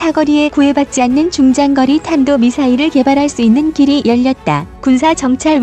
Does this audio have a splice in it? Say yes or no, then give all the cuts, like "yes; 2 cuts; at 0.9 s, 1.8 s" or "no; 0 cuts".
yes; 1 cut; at 4.7 s